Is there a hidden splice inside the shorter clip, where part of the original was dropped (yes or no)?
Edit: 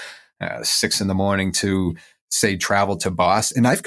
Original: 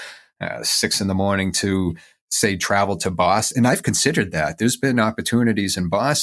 no